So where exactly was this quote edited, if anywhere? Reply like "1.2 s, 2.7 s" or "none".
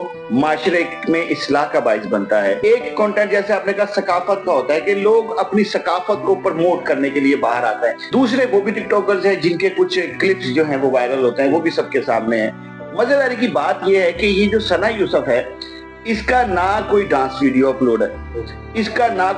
2.6 s, 8.0 s